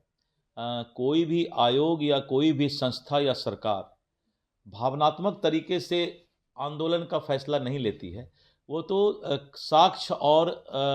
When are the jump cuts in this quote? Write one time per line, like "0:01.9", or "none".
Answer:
none

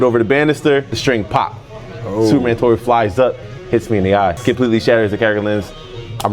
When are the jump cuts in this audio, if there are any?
0:00.9
0:04.4

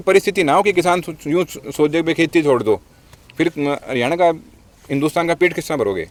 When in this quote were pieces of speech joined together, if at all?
none

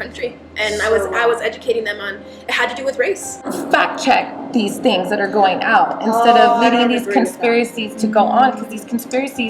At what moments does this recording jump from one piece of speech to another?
0:03.5

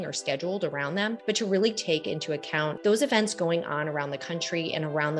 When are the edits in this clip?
0:02.8

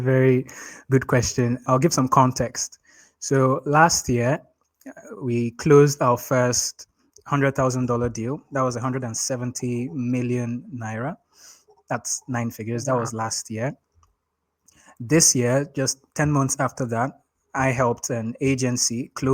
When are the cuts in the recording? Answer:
0:01.6

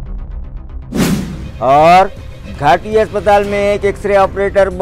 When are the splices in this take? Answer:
0:01.0

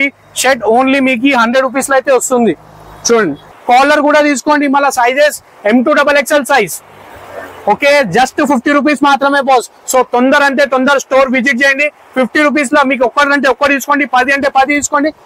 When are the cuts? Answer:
0:03.5

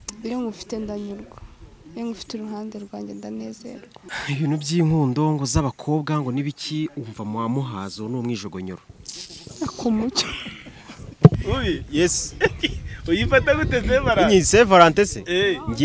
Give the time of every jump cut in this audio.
0:04.0
0:11.3

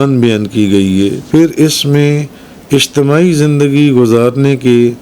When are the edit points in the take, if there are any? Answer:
0:01.2

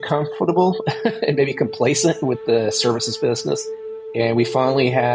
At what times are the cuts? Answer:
0:04.0

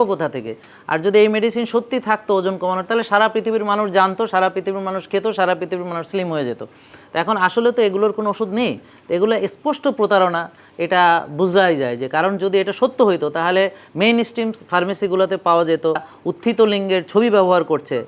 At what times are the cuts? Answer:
0:16.1

